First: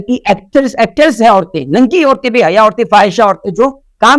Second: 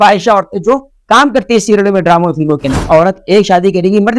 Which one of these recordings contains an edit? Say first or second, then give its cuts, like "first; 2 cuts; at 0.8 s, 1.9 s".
second; 1 cut; at 2.8 s